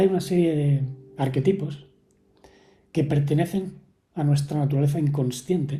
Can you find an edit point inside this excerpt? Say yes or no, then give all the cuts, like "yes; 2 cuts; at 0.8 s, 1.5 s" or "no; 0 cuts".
no; 0 cuts